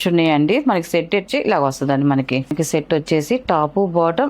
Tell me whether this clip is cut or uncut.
cut